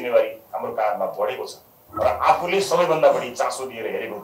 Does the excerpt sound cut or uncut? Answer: cut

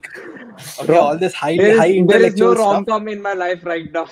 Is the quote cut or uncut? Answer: uncut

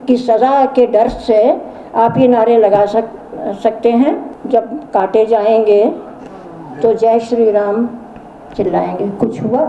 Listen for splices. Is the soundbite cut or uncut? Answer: cut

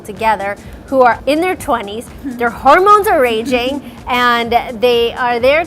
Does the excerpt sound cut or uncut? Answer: cut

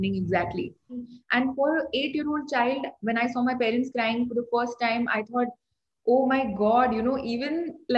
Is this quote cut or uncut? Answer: cut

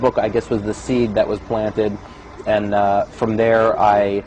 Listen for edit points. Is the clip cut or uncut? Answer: cut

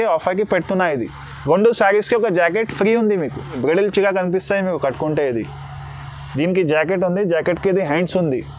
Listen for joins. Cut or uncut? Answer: cut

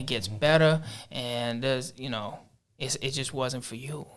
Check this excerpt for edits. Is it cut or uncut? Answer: uncut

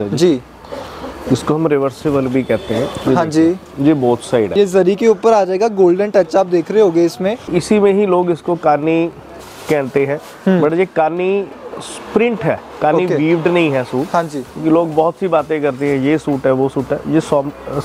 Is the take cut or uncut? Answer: cut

